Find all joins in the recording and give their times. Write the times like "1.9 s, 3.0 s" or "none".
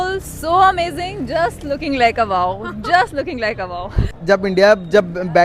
4.1 s